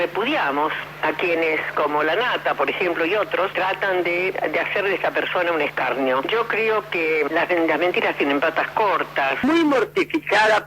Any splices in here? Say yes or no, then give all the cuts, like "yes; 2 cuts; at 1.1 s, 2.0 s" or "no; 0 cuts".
yes; 1 cut; at 9.4 s